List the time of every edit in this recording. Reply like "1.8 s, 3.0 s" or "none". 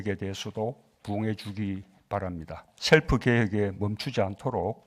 2.7 s